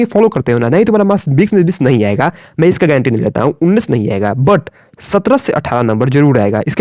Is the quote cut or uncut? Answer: uncut